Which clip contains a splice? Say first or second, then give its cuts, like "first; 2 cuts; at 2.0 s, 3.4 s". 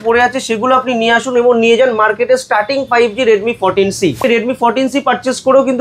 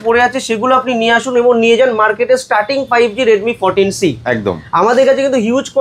first; 1 cut; at 4.2 s